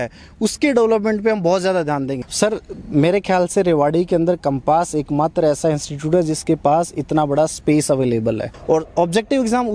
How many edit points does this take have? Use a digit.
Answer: 2